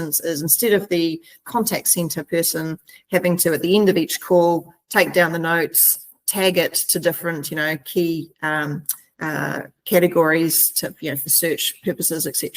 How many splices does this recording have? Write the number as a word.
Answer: one